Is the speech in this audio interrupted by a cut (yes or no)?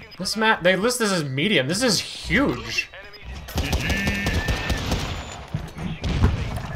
yes